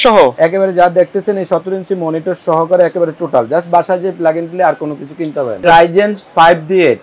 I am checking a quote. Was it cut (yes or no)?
yes